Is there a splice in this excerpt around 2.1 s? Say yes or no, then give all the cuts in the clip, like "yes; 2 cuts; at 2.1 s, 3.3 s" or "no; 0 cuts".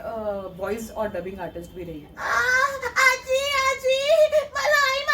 yes; 1 cut; at 2.1 s